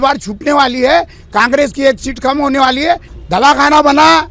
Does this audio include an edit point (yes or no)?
yes